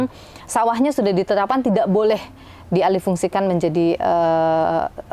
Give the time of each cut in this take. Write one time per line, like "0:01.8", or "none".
none